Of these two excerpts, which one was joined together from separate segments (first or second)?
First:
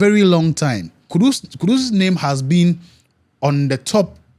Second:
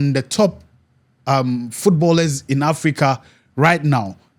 first